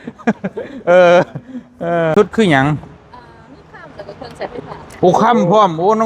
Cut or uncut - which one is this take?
cut